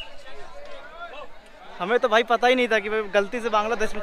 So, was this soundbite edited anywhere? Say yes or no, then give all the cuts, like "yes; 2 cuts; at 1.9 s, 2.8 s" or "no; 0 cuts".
no; 0 cuts